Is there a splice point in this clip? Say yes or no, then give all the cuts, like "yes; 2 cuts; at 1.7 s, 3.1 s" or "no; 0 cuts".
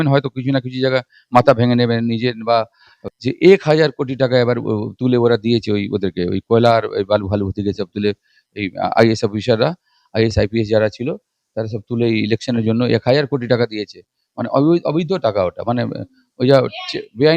yes; 1 cut; at 2.8 s